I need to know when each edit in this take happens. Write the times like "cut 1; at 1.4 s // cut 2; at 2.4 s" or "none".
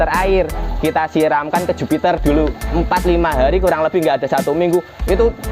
cut 1; at 2.6 s